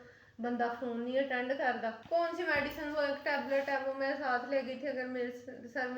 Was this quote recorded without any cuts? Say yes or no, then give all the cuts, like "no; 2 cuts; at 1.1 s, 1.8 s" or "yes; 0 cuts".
no; 1 cut; at 2.0 s